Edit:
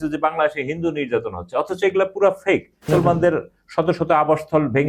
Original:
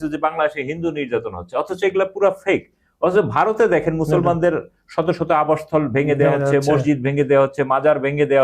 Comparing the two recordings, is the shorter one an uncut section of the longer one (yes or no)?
no